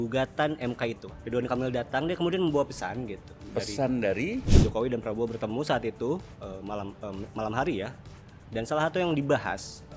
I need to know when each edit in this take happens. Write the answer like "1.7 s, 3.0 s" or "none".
1.1 s, 4.5 s